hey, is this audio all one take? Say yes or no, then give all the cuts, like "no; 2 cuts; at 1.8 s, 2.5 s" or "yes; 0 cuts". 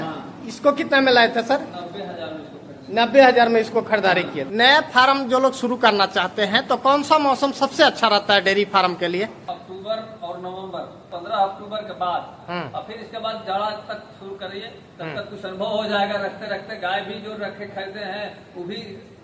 no; 3 cuts; at 4.4 s, 9.4 s, 11.0 s